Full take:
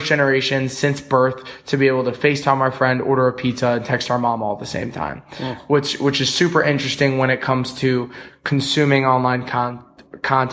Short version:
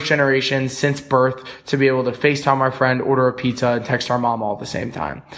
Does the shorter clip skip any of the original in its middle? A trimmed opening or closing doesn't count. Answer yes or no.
no